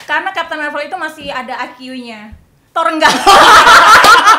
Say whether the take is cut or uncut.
uncut